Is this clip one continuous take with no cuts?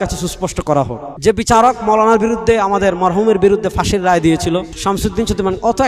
no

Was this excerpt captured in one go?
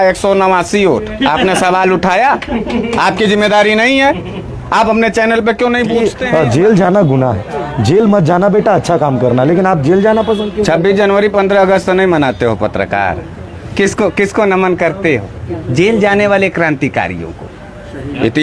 no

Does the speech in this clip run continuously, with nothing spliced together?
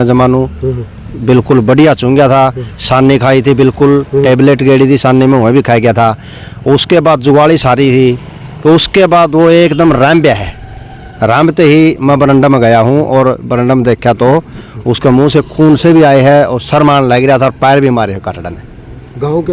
yes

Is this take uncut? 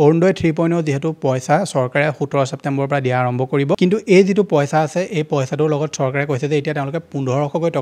no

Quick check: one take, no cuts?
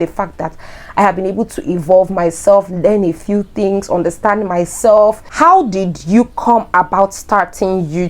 no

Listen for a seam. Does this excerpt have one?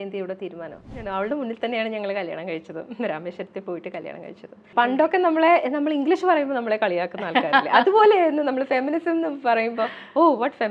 yes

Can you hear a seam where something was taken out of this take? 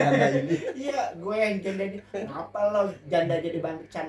no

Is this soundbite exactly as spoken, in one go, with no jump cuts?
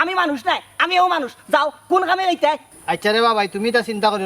no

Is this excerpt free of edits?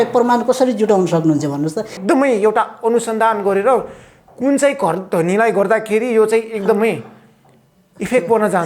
no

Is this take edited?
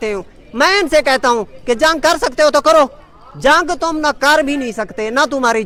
no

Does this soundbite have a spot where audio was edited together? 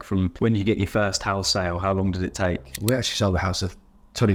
no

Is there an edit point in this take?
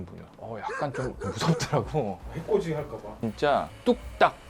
yes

